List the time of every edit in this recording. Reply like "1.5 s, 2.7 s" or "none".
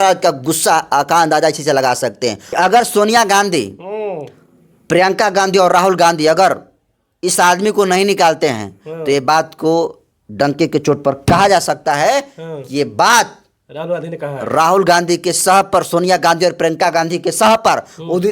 2.6 s